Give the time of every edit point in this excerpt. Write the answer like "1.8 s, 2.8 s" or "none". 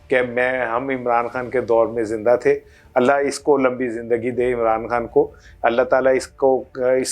none